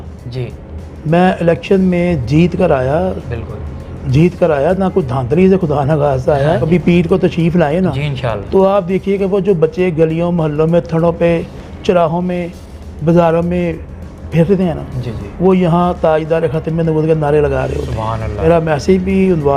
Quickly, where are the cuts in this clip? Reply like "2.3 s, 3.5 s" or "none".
6.6 s, 18.4 s

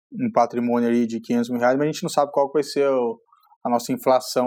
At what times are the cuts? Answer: none

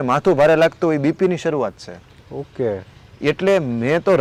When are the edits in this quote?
none

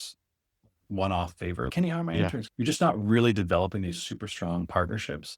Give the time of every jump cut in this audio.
2.5 s

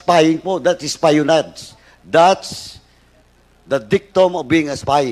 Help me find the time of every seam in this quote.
none

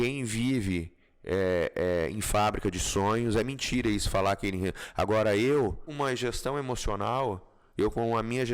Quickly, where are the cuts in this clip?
5.9 s

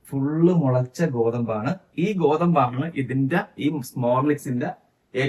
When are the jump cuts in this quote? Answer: none

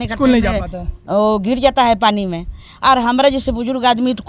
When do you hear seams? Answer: none

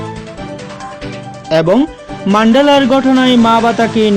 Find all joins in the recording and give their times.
1.5 s

